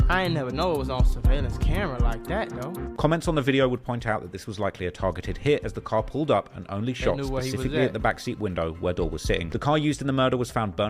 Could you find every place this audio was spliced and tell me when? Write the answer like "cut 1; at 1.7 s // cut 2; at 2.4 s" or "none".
cut 1; at 9.5 s